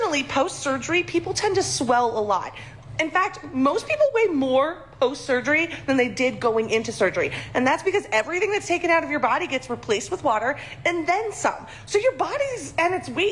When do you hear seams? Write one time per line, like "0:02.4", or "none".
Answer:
0:03.2
0:07.8
0:12.3